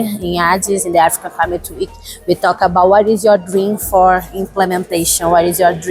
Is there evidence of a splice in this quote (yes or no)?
no